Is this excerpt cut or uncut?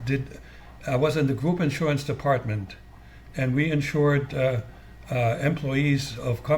uncut